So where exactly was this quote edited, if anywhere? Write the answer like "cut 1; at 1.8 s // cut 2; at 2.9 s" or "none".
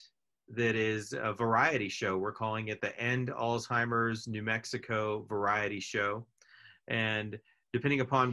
none